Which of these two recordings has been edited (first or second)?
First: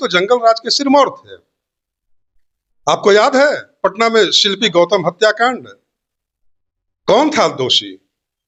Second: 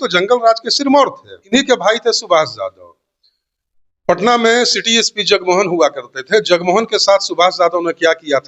second